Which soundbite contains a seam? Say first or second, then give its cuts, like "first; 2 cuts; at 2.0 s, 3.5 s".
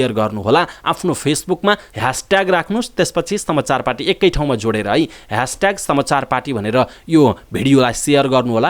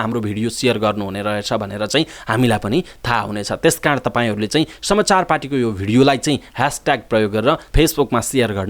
first; 1 cut; at 1.9 s